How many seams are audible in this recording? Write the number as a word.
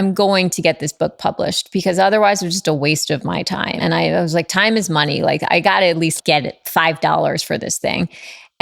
two